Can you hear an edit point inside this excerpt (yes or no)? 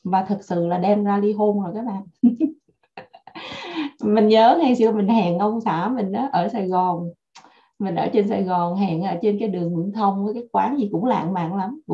no